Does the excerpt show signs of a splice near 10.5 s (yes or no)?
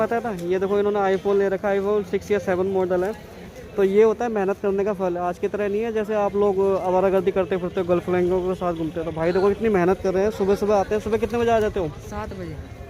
no